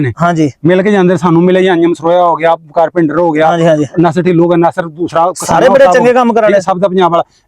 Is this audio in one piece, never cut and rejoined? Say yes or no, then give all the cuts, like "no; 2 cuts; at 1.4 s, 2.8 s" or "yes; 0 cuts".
yes; 0 cuts